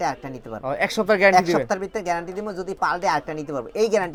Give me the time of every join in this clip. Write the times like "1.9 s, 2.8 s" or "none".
none